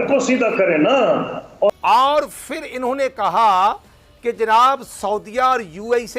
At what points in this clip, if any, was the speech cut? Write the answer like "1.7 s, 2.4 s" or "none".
1.7 s